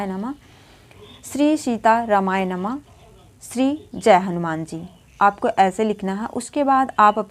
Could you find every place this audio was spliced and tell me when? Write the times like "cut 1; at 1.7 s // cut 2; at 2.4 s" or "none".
none